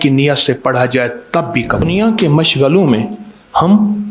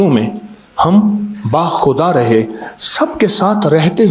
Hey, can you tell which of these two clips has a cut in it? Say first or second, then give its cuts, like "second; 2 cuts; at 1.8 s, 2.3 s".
first; 1 cut; at 1.8 s